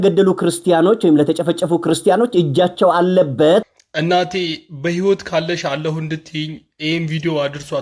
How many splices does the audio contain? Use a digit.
1